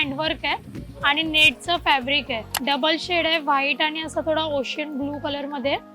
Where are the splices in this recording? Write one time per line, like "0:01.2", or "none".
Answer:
0:02.5